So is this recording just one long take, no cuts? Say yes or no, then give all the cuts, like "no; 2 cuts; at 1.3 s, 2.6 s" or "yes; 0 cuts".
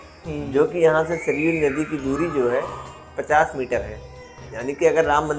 yes; 0 cuts